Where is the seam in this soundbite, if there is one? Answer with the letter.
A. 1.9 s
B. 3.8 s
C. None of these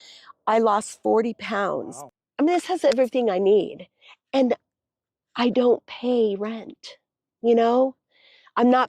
A